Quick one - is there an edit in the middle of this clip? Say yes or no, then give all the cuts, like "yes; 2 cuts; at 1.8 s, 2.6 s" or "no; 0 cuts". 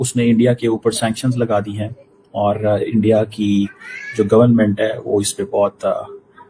no; 0 cuts